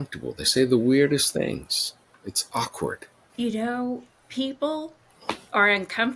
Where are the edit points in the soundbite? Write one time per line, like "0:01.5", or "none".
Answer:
0:03.1